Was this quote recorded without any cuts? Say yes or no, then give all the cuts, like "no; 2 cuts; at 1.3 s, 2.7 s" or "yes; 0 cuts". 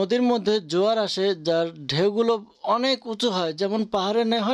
yes; 0 cuts